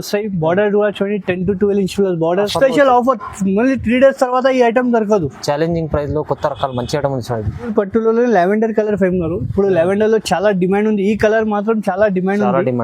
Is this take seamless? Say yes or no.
no